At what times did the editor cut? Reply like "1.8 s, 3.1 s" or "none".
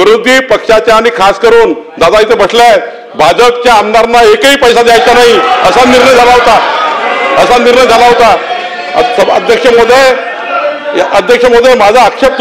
none

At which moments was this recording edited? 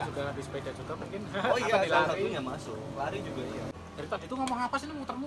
3.7 s

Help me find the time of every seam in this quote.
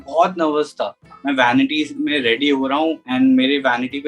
3.0 s

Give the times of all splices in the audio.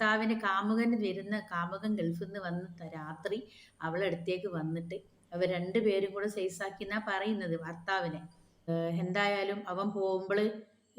8.7 s

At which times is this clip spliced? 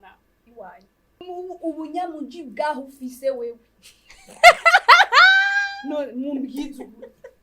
1.2 s

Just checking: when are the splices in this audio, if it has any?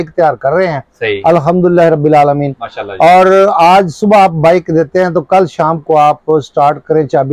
none

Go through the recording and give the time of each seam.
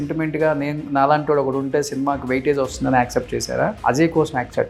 3.8 s

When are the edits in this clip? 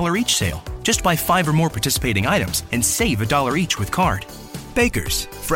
none

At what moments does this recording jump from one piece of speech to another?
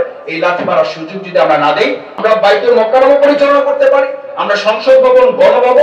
2.1 s

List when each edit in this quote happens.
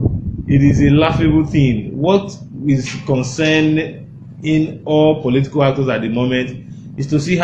none

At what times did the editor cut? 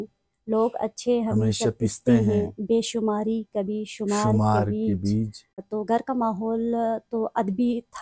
5.6 s

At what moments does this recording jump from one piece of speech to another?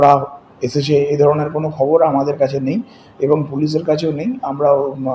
none

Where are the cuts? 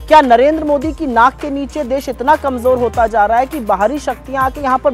none

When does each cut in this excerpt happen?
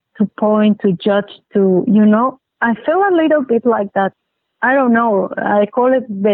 4.1 s

